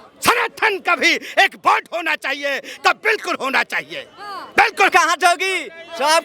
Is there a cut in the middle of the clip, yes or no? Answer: yes